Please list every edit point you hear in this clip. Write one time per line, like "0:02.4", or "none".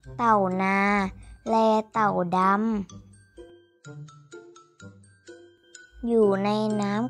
0:02.9
0:05.3

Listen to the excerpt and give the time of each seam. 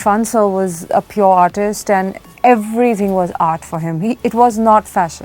0:00.9
0:02.2

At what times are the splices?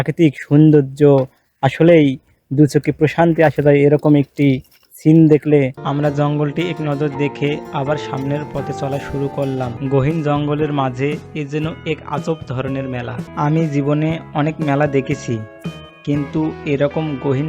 0:05.8
0:09.8
0:13.3

